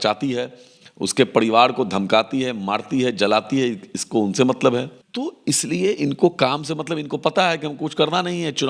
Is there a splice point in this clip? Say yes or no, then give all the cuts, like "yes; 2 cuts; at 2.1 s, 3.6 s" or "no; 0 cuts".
yes; 1 cut; at 5.0 s